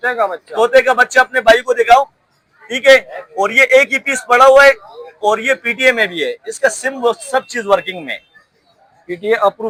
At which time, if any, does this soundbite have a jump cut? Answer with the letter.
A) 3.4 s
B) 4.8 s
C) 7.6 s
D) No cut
D